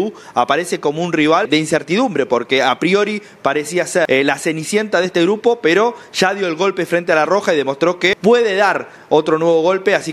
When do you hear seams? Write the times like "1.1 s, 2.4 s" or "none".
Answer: 1.5 s, 4.1 s, 8.2 s